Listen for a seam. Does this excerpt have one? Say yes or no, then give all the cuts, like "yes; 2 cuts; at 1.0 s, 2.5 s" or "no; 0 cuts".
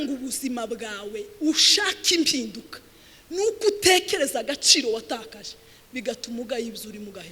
no; 0 cuts